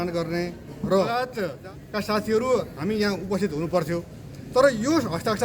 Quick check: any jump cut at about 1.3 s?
yes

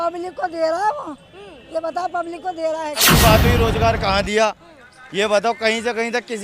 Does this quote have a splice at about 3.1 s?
yes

